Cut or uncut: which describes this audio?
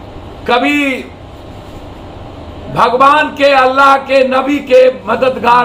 uncut